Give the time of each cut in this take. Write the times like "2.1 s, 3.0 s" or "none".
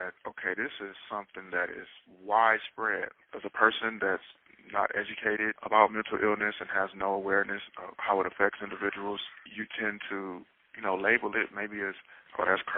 3.2 s